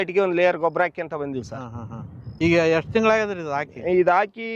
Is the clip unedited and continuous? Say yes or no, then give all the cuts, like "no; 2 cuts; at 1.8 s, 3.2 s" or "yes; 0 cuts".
yes; 0 cuts